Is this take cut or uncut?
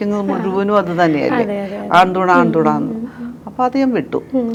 uncut